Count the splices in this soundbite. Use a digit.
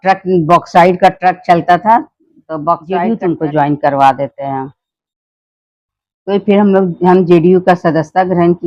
1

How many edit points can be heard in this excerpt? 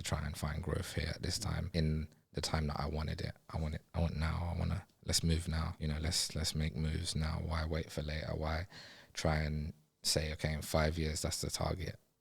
2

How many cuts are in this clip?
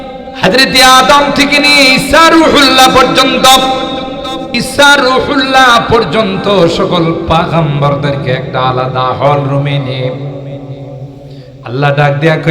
1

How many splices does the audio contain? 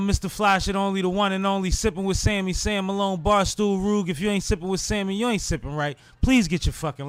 0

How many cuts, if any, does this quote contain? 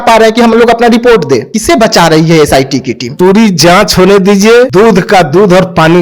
3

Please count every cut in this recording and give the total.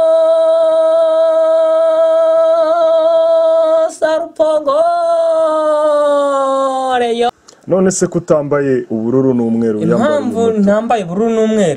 1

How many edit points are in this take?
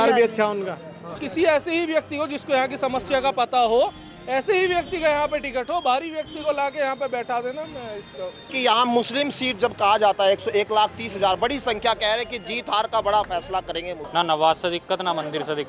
3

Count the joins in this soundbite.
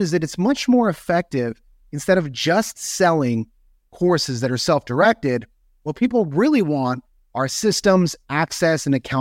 0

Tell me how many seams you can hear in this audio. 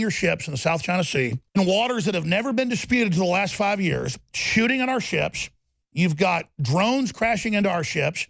1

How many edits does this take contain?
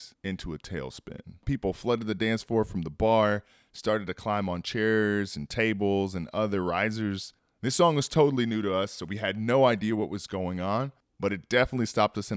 1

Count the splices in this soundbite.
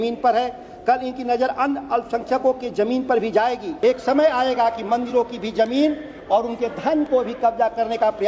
1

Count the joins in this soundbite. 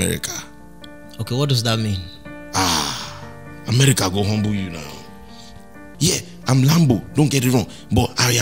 1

